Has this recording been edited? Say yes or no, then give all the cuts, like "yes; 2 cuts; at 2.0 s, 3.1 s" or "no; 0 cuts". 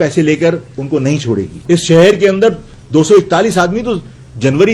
yes; 1 cut; at 1.5 s